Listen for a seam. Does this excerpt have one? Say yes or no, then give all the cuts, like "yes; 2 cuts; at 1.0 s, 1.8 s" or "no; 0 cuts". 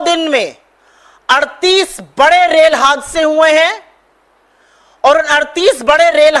no; 0 cuts